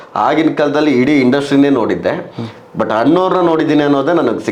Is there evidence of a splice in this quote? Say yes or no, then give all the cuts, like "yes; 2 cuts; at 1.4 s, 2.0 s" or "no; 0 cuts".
no; 0 cuts